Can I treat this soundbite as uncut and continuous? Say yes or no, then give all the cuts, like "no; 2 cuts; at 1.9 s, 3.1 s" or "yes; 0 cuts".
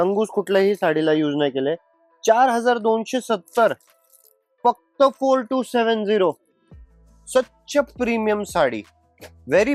yes; 0 cuts